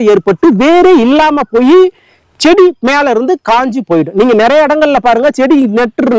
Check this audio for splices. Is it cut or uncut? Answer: uncut